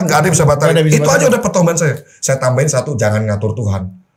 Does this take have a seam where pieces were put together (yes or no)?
no